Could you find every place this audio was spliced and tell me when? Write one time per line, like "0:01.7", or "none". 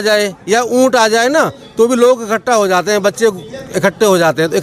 none